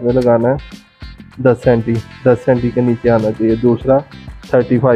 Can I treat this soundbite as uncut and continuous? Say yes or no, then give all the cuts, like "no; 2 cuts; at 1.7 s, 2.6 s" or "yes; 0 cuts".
yes; 0 cuts